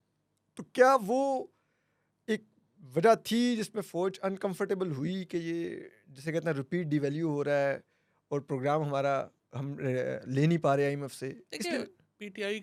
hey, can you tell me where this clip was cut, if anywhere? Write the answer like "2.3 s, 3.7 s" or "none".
none